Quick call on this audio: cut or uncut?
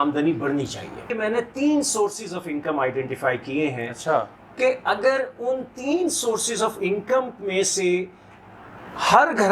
cut